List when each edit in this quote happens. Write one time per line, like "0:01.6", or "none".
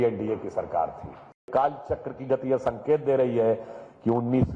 0:01.4